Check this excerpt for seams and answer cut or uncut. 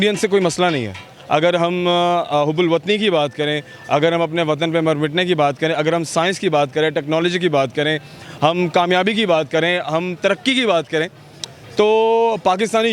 cut